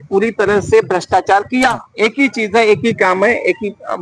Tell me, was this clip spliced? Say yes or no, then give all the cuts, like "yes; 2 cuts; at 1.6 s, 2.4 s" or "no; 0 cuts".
yes; 1 cut; at 1.8 s